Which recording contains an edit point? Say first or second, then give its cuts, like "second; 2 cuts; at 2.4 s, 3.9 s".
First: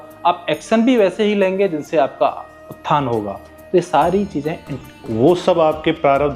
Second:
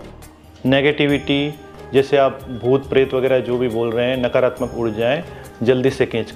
first; 1 cut; at 4.8 s